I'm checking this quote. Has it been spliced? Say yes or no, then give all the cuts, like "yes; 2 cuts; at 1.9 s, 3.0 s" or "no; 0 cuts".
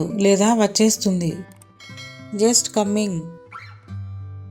yes; 1 cut; at 3.4 s